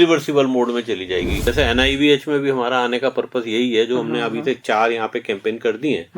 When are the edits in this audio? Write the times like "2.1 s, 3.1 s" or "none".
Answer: 1.4 s